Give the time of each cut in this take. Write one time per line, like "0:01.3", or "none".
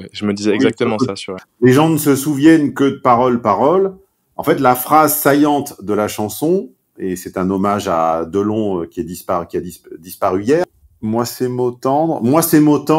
0:01.4
0:10.8